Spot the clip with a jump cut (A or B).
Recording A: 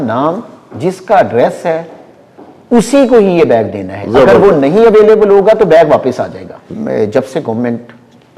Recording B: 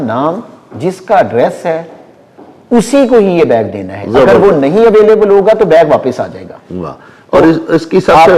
A